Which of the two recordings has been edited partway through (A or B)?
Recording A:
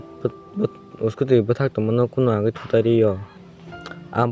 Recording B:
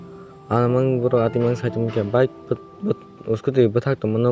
A